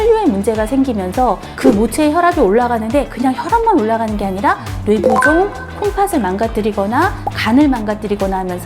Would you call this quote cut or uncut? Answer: cut